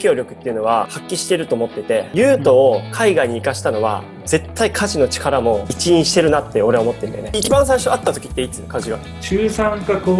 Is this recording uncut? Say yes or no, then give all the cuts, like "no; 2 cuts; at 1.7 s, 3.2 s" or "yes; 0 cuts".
no; 3 cuts; at 2.1 s, 7.2 s, 9.1 s